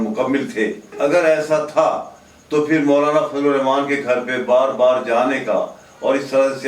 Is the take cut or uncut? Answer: cut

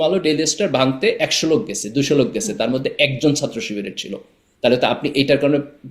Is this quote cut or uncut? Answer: uncut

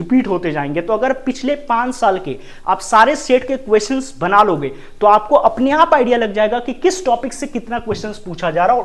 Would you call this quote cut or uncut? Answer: uncut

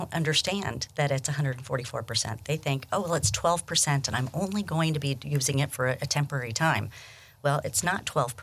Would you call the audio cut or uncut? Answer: uncut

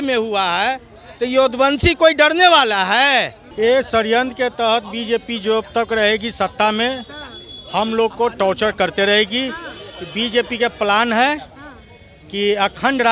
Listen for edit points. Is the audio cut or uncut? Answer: cut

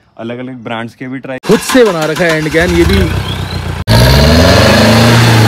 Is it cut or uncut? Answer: cut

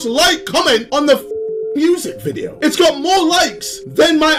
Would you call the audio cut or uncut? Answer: uncut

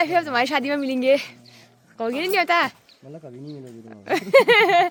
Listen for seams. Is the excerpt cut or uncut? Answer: uncut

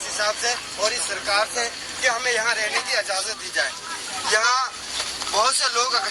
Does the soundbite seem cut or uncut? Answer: uncut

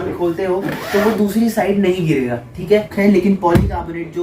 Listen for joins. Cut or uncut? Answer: cut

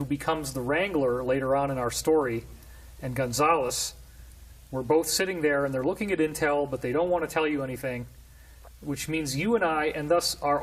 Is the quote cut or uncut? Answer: uncut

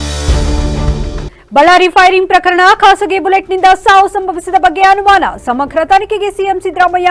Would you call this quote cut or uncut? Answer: cut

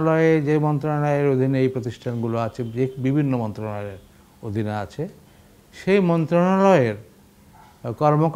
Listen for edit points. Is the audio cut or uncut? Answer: uncut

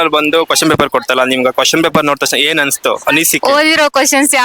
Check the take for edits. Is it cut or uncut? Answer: uncut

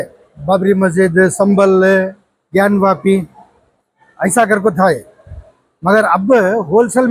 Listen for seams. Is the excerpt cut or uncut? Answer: uncut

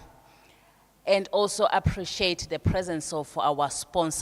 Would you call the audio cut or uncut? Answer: uncut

